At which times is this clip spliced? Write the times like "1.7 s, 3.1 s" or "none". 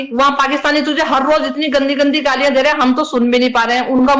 none